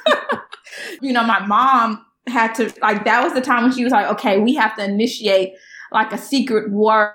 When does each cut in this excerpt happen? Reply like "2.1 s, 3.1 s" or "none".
0.9 s